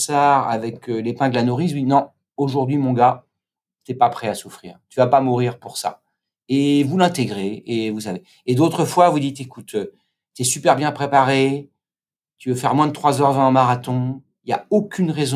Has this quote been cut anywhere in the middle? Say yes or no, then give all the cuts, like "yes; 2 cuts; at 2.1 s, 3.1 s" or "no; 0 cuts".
no; 0 cuts